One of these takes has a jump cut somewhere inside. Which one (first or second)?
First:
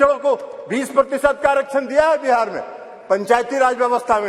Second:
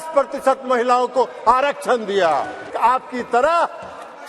second